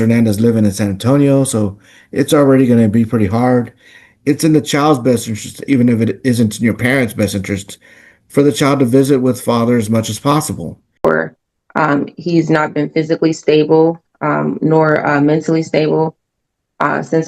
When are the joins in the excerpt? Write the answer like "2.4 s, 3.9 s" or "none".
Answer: 11.0 s